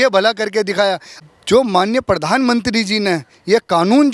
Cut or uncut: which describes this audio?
cut